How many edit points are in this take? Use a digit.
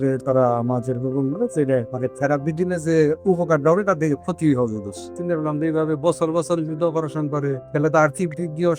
3